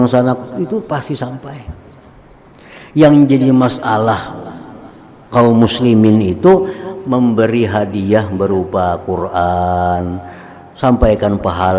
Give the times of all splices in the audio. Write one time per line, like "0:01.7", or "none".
none